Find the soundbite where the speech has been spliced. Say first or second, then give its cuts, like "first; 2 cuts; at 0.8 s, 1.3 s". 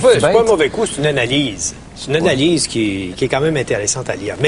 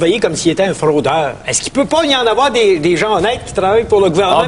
second; 1 cut; at 1.6 s